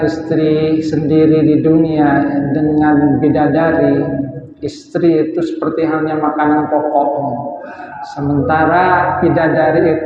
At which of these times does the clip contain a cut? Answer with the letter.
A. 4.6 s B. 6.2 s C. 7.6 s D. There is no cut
D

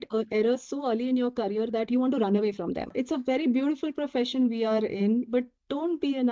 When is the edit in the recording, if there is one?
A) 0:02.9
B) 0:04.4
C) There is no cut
A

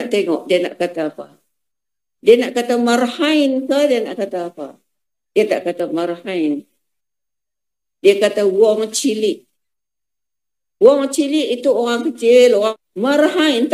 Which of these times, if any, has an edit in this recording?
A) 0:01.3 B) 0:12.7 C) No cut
B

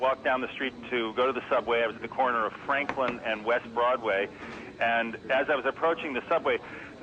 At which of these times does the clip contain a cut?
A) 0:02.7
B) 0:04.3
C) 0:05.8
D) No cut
B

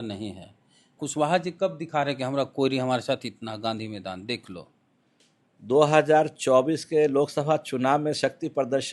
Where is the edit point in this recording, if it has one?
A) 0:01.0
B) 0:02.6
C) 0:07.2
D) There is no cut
A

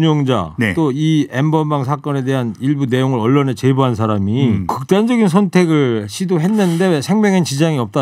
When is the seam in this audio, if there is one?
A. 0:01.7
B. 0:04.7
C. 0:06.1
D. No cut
B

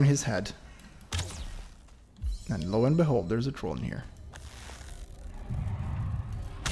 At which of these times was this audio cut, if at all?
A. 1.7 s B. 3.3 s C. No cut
A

